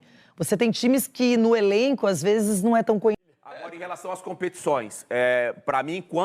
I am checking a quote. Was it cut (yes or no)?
yes